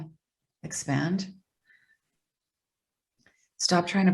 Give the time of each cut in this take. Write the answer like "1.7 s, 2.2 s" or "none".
none